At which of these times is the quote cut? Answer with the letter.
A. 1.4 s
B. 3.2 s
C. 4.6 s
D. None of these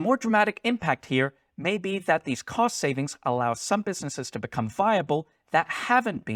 D